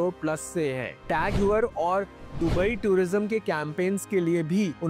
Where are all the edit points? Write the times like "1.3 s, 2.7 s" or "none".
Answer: none